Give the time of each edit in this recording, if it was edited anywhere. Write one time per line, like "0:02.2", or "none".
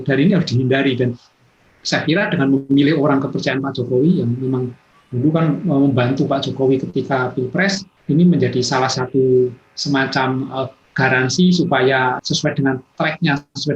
0:07.9
0:12.2